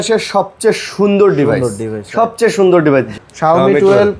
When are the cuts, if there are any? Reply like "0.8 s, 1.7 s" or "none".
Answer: 3.2 s